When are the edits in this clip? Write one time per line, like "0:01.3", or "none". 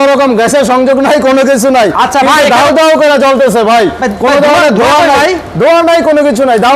none